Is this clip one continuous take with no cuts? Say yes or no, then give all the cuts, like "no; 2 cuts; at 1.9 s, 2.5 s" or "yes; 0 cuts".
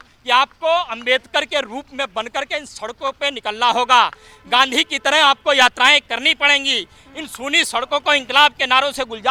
yes; 0 cuts